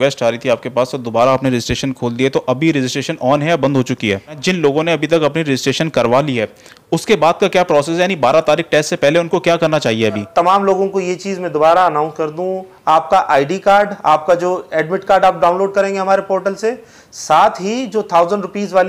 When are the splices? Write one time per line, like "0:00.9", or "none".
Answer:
0:04.4
0:10.3

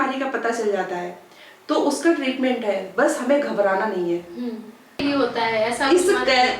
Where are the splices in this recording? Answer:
0:05.0

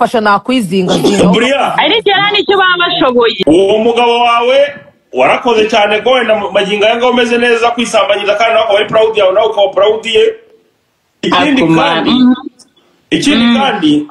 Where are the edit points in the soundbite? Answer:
0:03.4

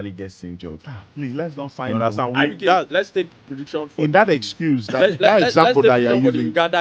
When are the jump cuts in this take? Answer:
none

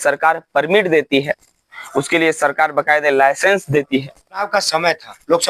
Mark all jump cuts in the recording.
0:04.5

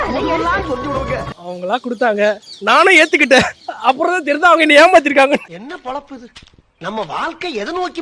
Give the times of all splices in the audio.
0:01.2
0:05.5

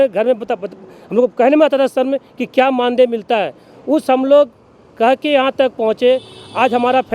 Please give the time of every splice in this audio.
none

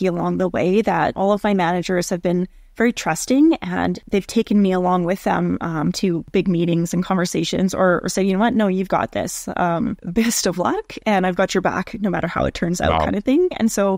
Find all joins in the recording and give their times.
none

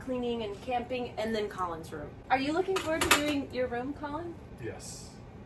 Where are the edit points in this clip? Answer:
0:02.1
0:04.5

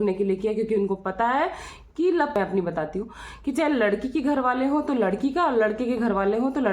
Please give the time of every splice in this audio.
0:02.4

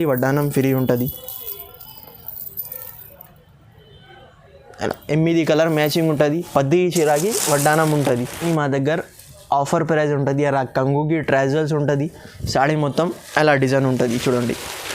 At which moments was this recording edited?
0:08.4

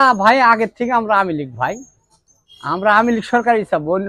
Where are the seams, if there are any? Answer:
none

